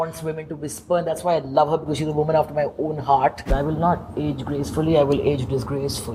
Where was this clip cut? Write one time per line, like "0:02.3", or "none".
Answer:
0:03.4